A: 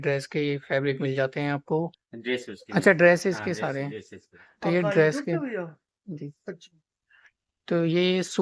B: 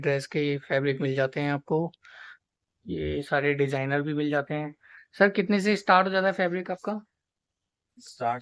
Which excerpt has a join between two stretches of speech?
A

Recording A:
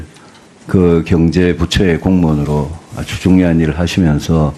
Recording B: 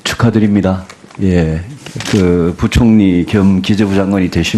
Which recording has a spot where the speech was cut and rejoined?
A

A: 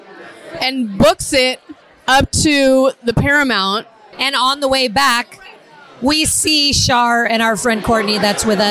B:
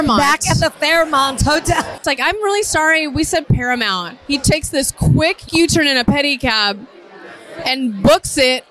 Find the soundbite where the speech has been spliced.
B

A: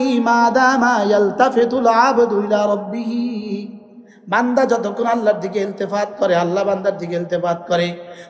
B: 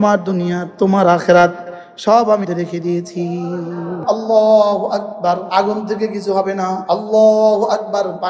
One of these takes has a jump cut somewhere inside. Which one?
B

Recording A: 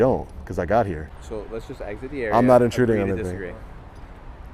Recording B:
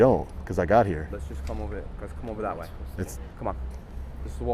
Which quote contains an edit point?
A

